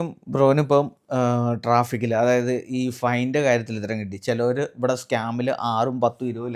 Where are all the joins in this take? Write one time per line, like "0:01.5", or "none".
none